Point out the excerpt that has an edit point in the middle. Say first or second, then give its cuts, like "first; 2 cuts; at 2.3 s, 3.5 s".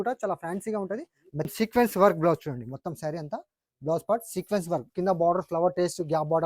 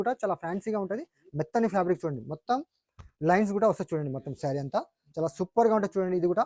first; 2 cuts; at 1.5 s, 4.9 s